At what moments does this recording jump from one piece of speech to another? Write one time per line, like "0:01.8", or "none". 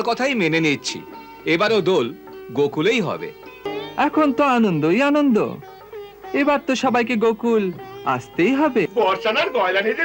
0:03.7
0:08.9